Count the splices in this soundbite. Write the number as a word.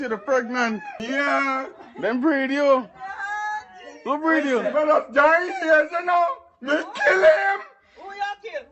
one